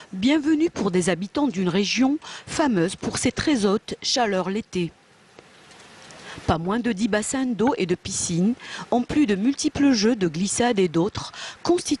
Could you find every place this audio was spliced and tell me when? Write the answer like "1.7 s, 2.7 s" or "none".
5.0 s